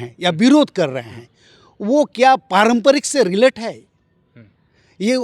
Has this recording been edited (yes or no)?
no